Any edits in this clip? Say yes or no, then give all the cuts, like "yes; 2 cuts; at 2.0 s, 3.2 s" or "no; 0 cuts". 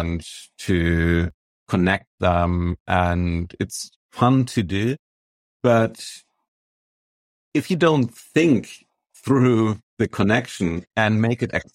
no; 0 cuts